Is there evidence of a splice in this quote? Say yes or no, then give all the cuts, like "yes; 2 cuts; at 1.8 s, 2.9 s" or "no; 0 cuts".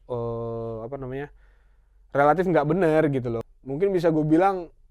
yes; 1 cut; at 3.4 s